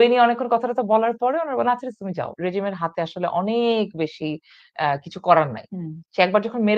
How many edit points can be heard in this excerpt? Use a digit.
1